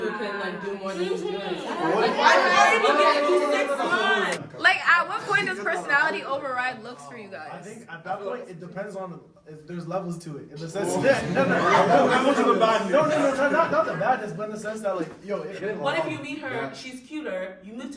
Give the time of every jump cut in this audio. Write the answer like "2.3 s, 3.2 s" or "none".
4.4 s, 15.6 s